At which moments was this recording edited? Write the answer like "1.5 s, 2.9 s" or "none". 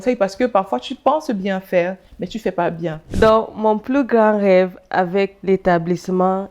3.0 s, 5.4 s